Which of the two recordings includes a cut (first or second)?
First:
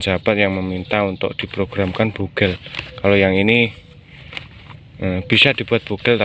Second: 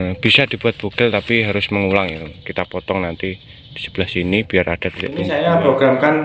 second